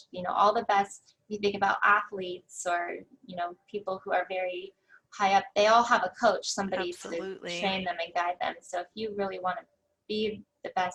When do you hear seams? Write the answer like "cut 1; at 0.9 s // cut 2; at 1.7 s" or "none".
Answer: none